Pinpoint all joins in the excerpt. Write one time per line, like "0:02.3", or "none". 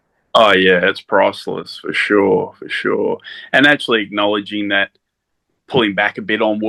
none

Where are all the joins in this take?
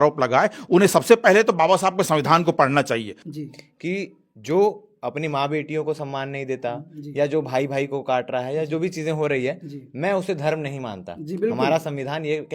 0:03.2

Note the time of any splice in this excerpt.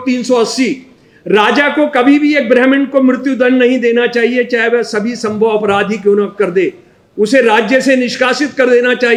none

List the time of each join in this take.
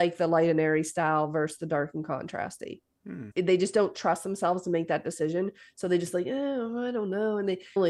none

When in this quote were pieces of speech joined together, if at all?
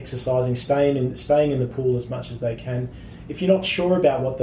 none

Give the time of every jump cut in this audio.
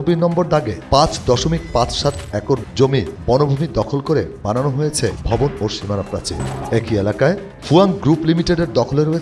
0:06.4

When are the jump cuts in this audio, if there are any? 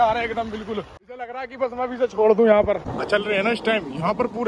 0:01.4
0:02.9

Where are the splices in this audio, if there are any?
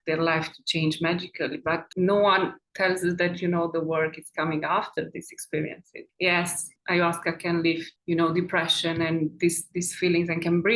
0:01.9

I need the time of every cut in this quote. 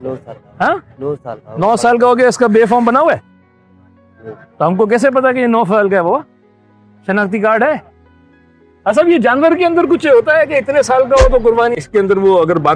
0:11.8

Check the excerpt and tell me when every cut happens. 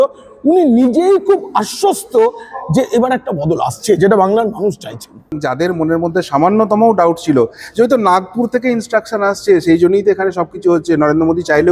0:05.4

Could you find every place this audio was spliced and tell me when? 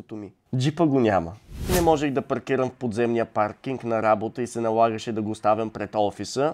0:01.6

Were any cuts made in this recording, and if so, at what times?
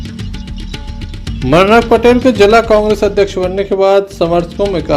none

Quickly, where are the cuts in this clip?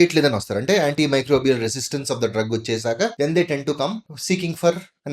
0:00.9
0:03.1
0:04.1

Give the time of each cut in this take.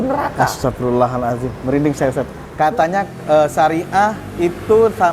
0:02.4

